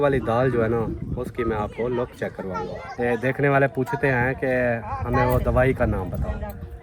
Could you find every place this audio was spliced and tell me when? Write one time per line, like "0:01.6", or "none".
0:02.8